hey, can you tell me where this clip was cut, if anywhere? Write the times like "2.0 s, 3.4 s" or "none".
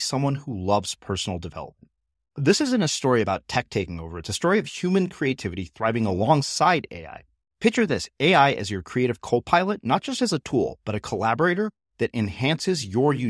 none

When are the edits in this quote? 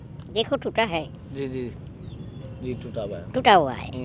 none

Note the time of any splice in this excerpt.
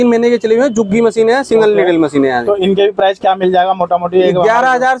none

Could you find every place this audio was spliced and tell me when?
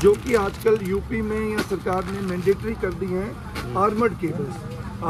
none

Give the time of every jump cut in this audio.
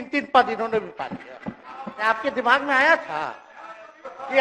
2.0 s

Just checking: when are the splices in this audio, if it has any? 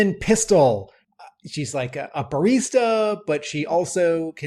1.0 s

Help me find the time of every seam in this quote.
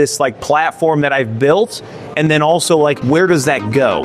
3.0 s

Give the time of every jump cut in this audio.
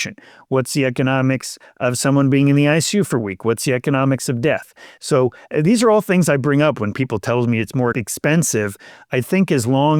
7.9 s, 9.1 s

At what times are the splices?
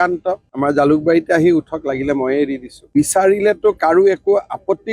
2.8 s

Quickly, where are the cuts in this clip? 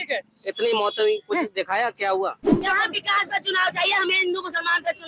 2.6 s

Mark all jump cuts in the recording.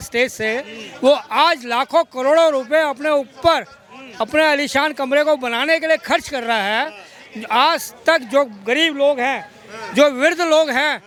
none

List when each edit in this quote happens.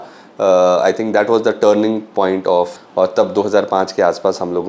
2.9 s

